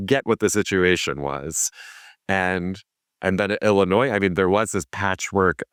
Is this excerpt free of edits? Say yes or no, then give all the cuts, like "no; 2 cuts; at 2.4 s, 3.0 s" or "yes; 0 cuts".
yes; 0 cuts